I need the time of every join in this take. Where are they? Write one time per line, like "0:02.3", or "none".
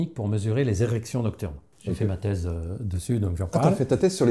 none